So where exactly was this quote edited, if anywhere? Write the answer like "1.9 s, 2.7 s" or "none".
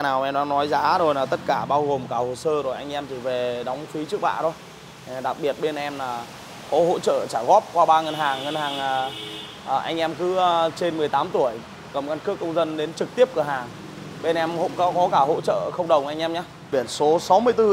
16.5 s